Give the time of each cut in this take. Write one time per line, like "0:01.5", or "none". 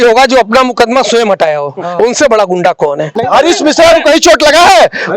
0:03.2